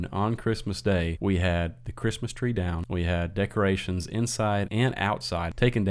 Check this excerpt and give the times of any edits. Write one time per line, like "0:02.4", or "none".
0:01.1
0:02.8
0:04.9